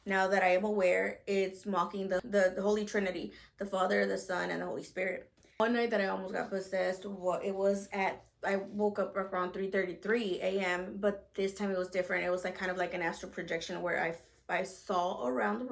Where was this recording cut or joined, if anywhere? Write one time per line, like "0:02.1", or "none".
none